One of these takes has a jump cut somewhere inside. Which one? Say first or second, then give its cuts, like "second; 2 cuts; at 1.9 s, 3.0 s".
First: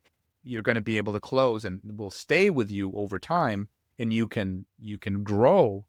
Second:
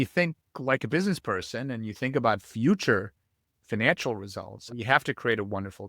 second; 1 cut; at 4.7 s